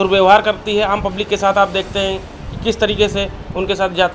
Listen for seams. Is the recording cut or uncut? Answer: uncut